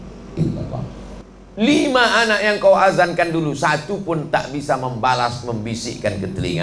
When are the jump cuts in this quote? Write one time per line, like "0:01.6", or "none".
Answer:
0:01.1